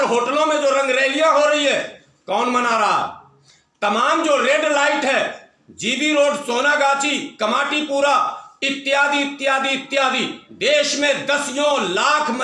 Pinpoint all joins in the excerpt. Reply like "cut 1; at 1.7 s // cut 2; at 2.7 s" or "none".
none